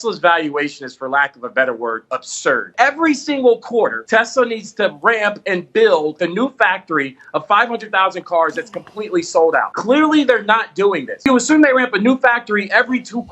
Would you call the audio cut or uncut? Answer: cut